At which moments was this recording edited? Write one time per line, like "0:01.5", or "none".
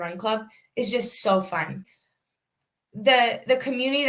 0:01.8